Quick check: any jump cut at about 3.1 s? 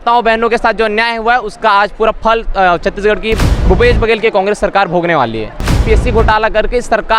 no; 1 cut; at 5.8 s

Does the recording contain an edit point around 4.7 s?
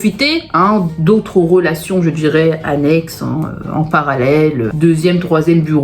yes; 1 cut; at 4.7 s

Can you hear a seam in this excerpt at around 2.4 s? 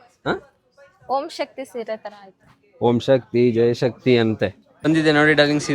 no; 1 cut; at 4.7 s

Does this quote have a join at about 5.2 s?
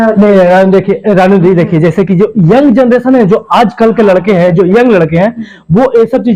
no; 0 cuts

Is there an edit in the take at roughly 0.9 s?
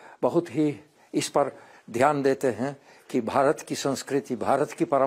yes; 1 cut; at 0.9 s

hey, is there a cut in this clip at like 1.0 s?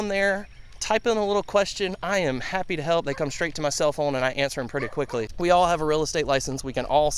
no; 1 cut; at 5.3 s

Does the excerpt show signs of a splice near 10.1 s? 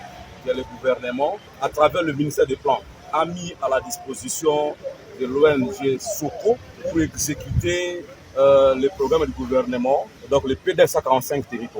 yes; 4 cuts; at 1.5 s, 6.7 s, 8.1 s, 10.1 s

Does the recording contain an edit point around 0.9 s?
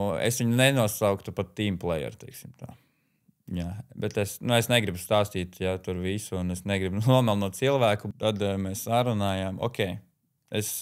no; 1 cut; at 8.0 s

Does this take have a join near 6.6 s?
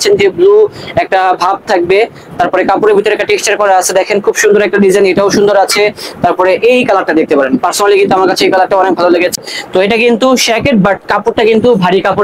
no; 1 cut; at 9.3 s

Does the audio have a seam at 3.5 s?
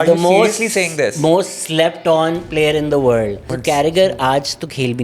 yes; 1 cut; at 3.5 s

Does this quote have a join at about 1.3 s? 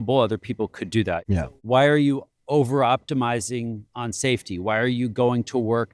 yes; 1 cut; at 1.3 s

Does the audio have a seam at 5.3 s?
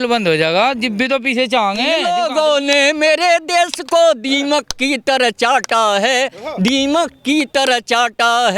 no; 1 cut; at 2.0 s

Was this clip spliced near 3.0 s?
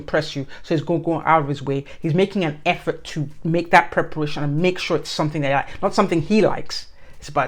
no; 0 cuts

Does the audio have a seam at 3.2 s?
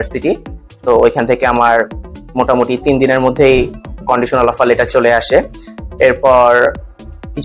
no; 0 cuts

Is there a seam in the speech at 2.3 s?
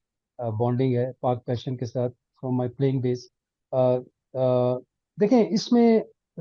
no; 0 cuts

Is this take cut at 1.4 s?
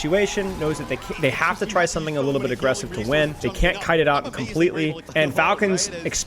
no; 2 cuts; at 3.4 s, 5.0 s

